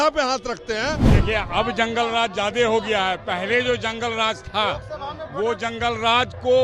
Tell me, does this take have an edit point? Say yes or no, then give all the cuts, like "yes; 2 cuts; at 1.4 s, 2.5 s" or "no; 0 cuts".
yes; 1 cut; at 1.1 s